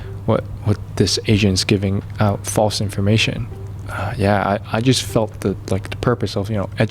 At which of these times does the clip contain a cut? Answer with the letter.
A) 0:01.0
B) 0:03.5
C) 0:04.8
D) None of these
B